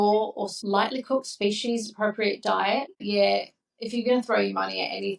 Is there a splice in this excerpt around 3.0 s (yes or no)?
yes